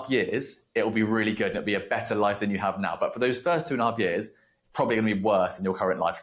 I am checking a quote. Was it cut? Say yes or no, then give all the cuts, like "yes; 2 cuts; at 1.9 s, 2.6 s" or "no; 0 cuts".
no; 0 cuts